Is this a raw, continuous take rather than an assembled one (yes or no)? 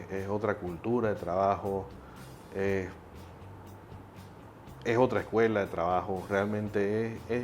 yes